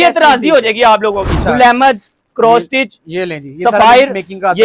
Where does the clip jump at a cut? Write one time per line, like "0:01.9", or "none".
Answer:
0:01.3